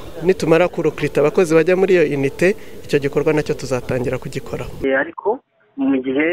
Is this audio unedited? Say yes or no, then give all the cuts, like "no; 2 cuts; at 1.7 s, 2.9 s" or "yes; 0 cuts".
no; 1 cut; at 4.8 s